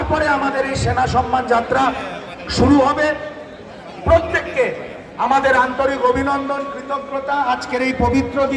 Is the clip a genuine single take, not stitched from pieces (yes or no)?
yes